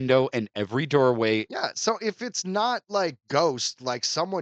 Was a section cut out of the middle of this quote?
yes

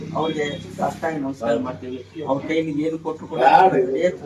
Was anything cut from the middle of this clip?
no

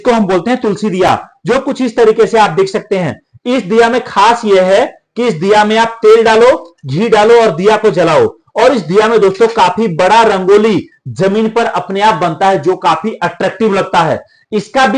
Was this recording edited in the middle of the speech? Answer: no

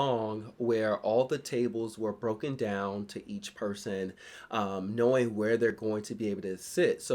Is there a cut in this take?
no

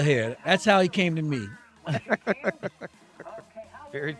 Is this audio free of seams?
yes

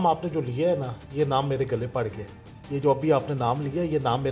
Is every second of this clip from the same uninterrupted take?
yes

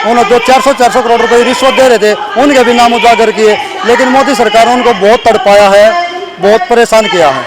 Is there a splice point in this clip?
no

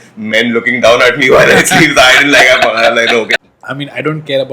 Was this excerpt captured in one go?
no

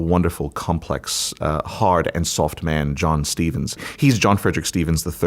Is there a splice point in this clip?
no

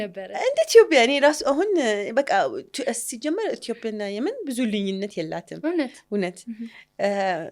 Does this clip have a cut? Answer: no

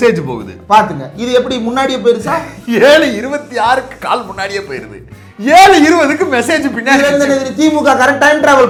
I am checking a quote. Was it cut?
no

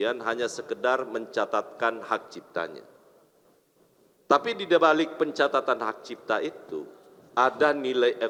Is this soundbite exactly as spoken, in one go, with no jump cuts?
yes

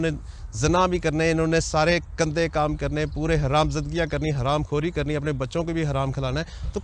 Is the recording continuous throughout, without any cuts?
yes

